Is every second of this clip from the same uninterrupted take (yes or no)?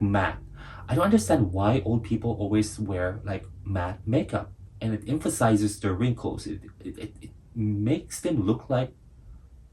yes